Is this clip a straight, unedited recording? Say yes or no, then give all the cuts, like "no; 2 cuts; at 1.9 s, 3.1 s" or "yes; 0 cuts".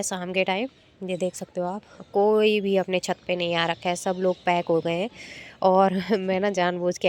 yes; 0 cuts